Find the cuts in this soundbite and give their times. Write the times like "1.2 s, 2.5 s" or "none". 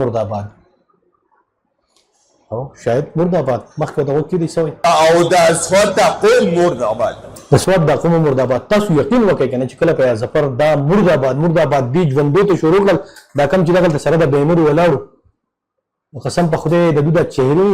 4.8 s